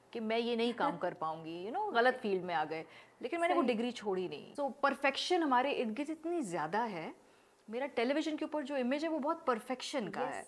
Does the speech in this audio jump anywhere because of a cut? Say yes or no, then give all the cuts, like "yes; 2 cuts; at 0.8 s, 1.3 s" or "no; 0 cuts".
yes; 1 cut; at 4.4 s